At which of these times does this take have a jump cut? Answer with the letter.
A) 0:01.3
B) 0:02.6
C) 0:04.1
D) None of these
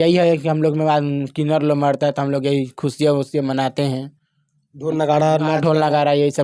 D